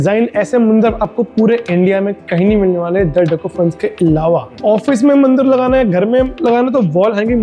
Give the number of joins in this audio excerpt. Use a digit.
1